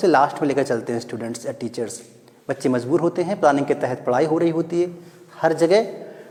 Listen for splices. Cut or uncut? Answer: uncut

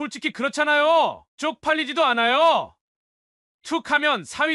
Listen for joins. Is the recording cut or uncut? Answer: cut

